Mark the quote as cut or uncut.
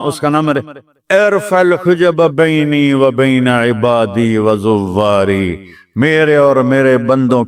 uncut